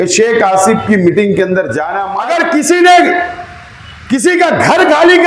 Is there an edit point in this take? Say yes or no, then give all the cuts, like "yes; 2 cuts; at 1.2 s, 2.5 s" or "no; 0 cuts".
yes; 1 cut; at 2.0 s